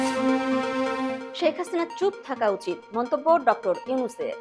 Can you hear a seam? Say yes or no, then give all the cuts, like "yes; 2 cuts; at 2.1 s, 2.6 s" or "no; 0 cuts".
no; 0 cuts